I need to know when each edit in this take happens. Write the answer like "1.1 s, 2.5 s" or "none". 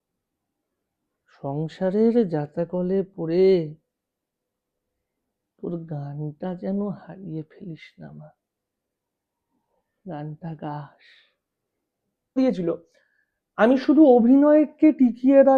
12.4 s